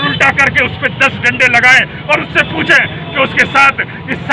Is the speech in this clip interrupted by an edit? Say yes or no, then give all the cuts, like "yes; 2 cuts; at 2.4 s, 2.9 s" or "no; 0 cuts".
no; 0 cuts